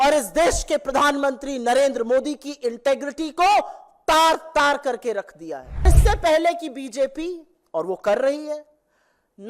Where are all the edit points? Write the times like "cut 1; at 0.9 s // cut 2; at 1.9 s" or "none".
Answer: cut 1; at 5.9 s

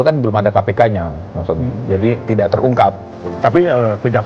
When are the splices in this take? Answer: cut 1; at 3.1 s

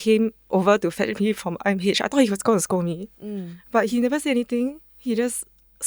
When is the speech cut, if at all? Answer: cut 1; at 3.9 s

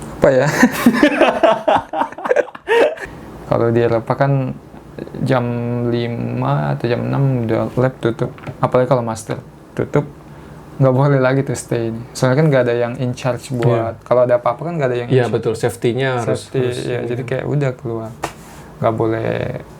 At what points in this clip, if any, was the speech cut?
cut 1; at 3.0 s

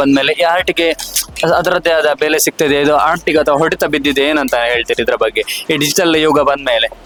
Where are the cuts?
none

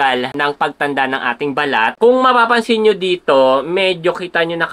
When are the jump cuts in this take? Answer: cut 1; at 2.0 s

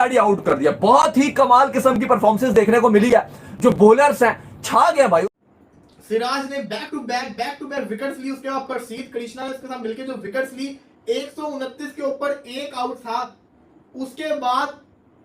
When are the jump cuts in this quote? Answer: cut 1; at 5.2 s

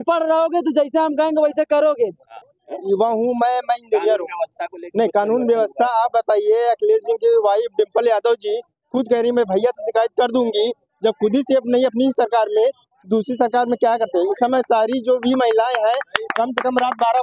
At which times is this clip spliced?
cut 1; at 2.3 s

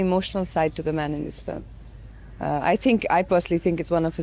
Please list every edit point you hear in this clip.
none

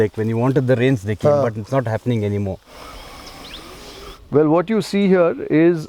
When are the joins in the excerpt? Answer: cut 1; at 2.7 s

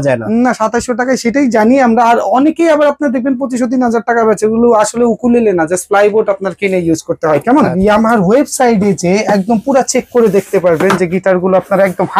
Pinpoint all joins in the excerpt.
cut 1; at 7.5 s

